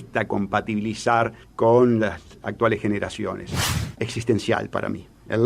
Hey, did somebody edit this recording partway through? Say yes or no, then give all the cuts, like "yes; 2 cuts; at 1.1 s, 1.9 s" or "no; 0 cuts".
yes; 1 cut; at 3.6 s